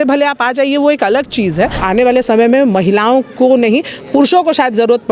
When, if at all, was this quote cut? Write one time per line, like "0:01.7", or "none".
0:01.8